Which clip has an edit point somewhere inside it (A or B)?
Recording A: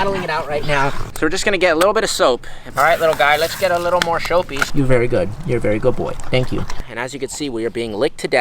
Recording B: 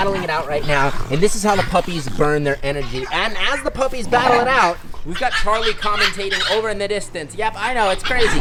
A